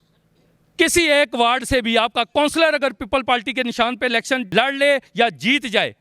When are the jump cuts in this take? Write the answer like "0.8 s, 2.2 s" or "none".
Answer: 4.5 s